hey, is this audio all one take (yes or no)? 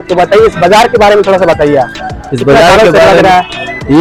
yes